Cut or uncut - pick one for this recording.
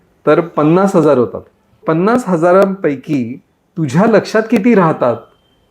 cut